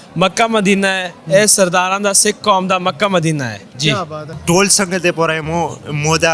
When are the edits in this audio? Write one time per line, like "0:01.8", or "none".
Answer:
0:04.3